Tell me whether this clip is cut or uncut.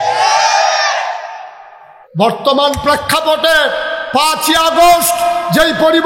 cut